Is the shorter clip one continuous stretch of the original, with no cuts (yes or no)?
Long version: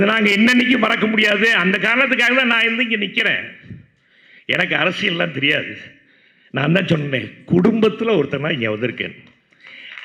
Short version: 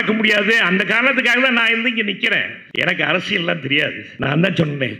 no